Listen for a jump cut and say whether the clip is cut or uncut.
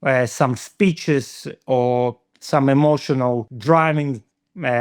cut